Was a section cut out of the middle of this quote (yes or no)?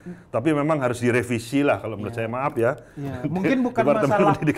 no